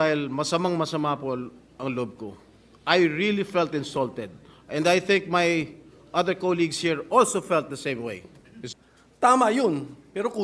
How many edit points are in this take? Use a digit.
1